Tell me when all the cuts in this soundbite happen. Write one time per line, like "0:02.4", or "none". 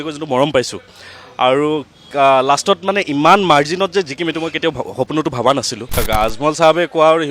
0:06.0